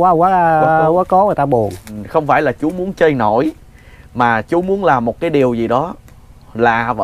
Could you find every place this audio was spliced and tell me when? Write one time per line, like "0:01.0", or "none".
0:01.9